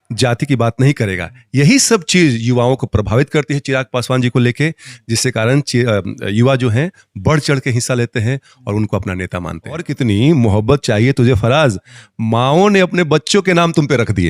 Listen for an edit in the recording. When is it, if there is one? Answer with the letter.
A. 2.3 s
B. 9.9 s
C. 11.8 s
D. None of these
B